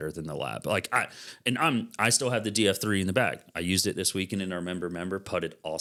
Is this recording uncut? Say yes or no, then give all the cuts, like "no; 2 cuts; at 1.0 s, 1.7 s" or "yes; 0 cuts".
yes; 0 cuts